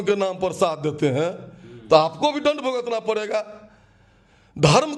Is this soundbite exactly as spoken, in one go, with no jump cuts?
yes; 0 cuts

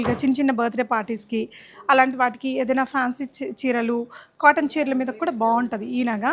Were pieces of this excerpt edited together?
no; 0 cuts

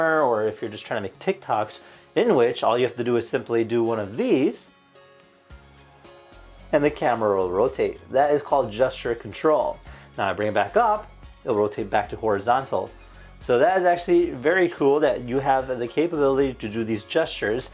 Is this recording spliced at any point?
no; 0 cuts

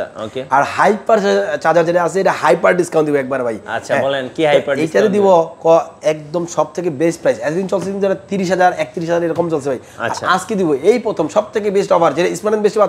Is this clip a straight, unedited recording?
yes; 0 cuts

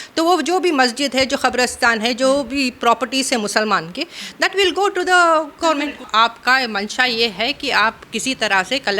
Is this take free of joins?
no; 1 cut; at 6.0 s

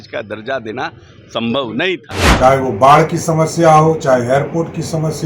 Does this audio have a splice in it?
yes; 1 cut; at 2.2 s

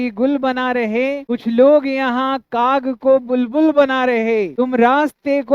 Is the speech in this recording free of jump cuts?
no; 1 cut; at 1.2 s

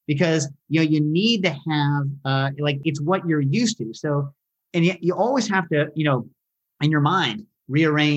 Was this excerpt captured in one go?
no; 1 cut; at 2.8 s

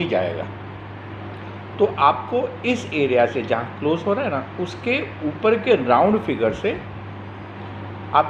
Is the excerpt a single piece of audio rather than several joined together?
yes; 0 cuts

